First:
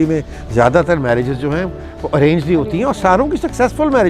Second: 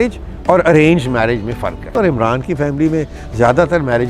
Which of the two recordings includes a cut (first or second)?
second